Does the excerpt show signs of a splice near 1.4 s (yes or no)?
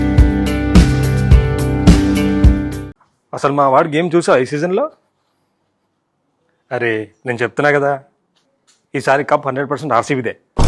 no